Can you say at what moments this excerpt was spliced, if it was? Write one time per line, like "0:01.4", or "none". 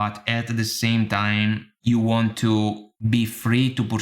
0:01.7
0:02.9